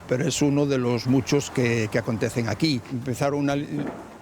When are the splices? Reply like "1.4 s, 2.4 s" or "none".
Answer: 2.9 s